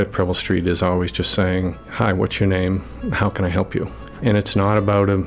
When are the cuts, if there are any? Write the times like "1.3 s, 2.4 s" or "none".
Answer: 1.8 s, 4.0 s

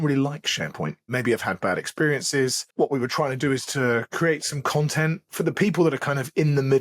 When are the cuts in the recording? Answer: 1.1 s, 2.6 s, 5.3 s

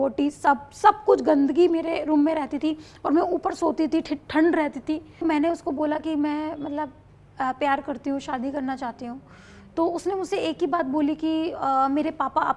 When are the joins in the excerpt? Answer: 5.2 s

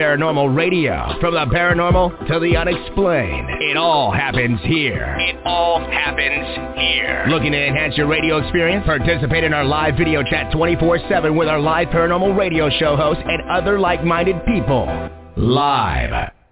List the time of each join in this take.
none

